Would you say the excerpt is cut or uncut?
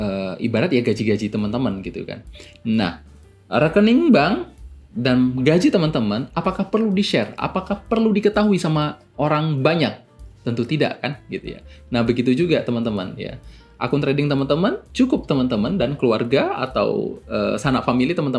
uncut